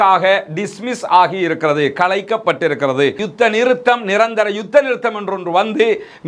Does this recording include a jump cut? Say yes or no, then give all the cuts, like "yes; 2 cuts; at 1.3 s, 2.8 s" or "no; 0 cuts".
yes; 1 cut; at 3.2 s